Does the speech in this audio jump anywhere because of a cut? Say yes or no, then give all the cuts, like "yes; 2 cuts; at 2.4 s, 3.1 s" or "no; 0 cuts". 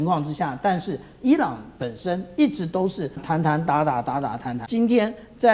yes; 2 cuts; at 3.2 s, 4.5 s